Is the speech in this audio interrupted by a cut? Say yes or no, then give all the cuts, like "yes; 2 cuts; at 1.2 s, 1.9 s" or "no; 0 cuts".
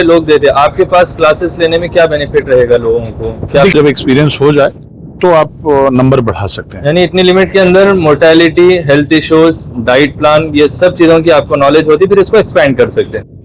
yes; 1 cut; at 3.7 s